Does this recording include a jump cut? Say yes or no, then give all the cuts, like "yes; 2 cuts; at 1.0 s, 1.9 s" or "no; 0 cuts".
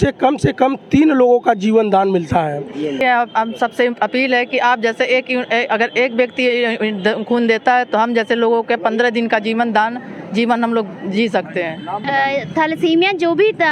yes; 2 cuts; at 3.0 s, 12.0 s